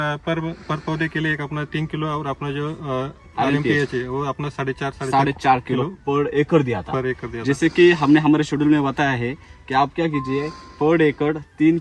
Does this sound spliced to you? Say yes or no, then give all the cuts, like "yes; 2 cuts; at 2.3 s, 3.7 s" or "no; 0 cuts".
no; 0 cuts